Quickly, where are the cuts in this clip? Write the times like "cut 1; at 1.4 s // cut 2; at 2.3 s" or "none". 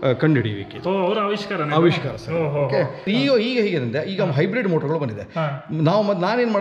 cut 1; at 3.1 s